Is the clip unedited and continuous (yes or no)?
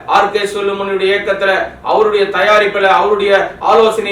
yes